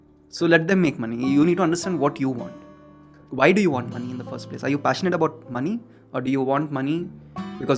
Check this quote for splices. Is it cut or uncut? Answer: uncut